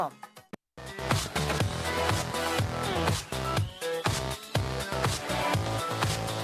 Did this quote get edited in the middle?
no; 0 cuts

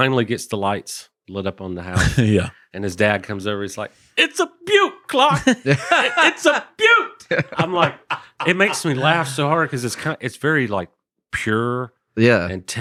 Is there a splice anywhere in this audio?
no; 0 cuts

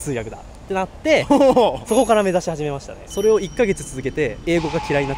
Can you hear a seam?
yes; 1 cut; at 3.0 s

